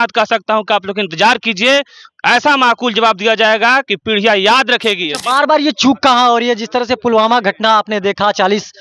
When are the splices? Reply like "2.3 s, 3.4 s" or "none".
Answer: 5.1 s